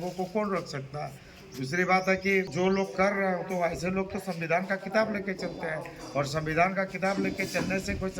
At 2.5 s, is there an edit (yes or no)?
yes